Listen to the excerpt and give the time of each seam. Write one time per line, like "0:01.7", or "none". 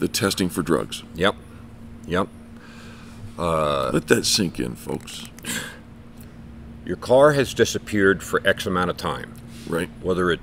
0:06.2